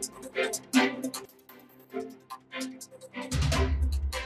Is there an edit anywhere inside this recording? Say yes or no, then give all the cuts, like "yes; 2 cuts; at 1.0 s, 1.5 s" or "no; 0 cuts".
no; 0 cuts